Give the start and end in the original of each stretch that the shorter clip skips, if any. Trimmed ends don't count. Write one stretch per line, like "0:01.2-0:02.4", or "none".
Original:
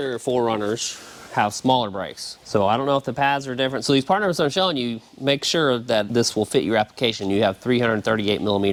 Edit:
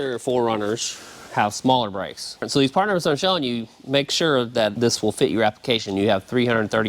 0:02.4-0:03.8